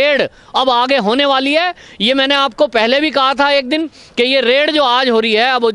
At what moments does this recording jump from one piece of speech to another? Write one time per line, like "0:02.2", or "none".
none